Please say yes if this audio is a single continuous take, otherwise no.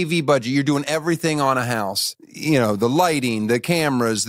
yes